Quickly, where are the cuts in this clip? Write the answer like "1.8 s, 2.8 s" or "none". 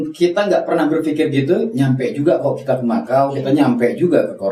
none